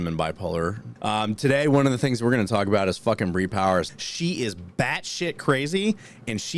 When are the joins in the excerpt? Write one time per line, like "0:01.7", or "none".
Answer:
0:00.9
0:03.9